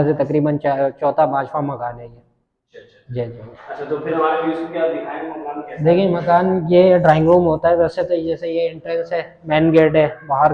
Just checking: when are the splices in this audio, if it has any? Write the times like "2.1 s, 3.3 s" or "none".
none